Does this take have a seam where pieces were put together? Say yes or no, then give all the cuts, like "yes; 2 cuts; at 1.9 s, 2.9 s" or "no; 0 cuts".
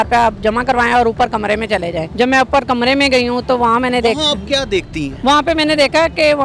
yes; 2 cuts; at 2.0 s, 5.0 s